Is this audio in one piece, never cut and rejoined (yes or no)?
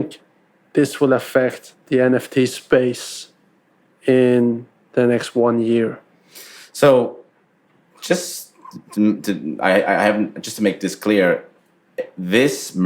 yes